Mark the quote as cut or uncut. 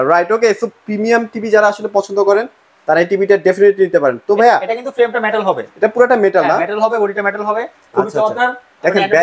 uncut